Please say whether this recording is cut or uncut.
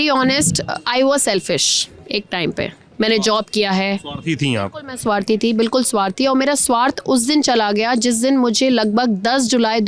uncut